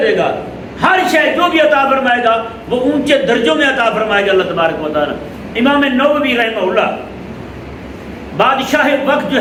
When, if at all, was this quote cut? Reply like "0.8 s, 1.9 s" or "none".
none